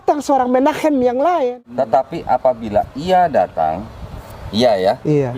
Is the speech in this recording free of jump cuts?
no; 1 cut; at 1.6 s

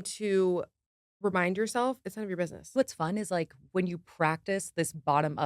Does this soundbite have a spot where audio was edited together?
yes; 1 cut; at 2.8 s

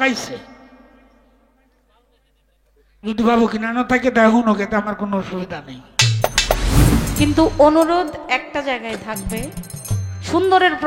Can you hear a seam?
yes; 1 cut; at 6.7 s

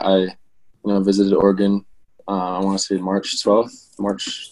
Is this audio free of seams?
yes; 0 cuts

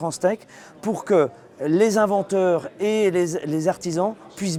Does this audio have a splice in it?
no; 0 cuts

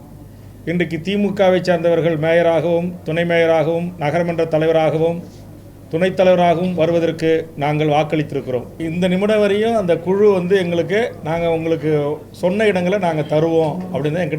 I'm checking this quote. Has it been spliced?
yes; 1 cut; at 8.7 s

